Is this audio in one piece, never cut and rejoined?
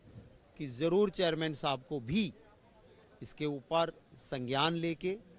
yes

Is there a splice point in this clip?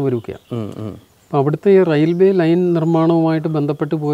no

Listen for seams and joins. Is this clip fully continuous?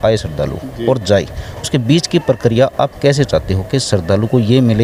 yes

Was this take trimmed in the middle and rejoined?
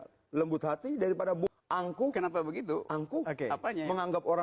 yes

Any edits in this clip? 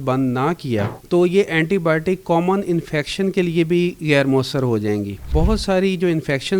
yes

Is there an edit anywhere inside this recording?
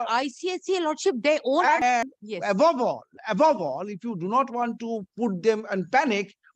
yes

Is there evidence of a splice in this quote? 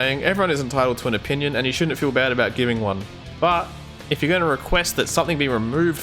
no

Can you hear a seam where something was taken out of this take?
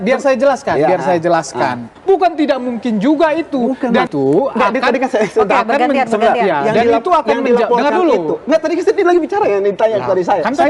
yes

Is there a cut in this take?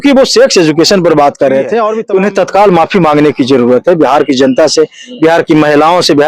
yes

